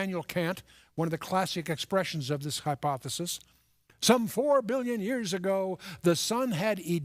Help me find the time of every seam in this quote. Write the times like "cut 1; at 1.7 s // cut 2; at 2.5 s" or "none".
cut 1; at 5.7 s